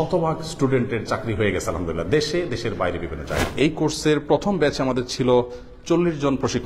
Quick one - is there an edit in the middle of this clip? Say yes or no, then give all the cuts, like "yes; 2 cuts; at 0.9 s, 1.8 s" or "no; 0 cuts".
yes; 1 cut; at 3.5 s